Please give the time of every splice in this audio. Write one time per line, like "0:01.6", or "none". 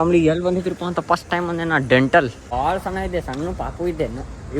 0:02.4